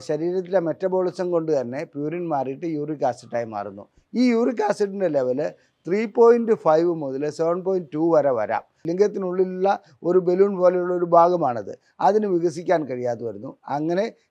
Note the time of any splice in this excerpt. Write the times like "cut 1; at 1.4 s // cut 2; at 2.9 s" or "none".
cut 1; at 8.7 s